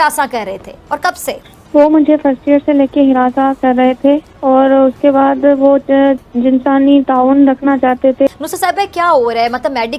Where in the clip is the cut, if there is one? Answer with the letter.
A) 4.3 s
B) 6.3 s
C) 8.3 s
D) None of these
C